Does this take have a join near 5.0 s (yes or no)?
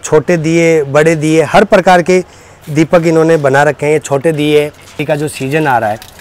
yes